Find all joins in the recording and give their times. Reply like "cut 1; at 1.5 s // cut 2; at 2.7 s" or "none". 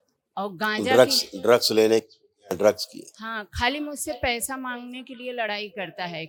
none

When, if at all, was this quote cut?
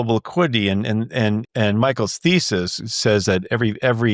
none

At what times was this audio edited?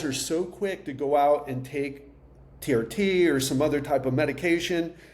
none

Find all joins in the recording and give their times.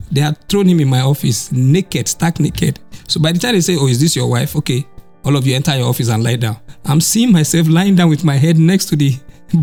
none

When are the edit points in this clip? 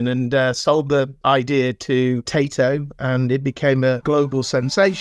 cut 1; at 1.1 s // cut 2; at 2.3 s // cut 3; at 4.0 s

